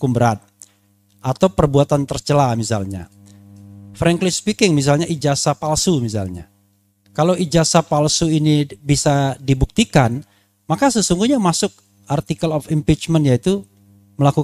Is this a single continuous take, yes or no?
yes